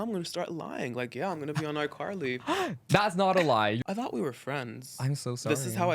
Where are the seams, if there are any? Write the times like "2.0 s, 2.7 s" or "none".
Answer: 3.8 s